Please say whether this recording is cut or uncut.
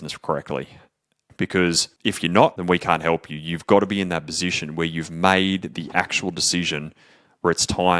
cut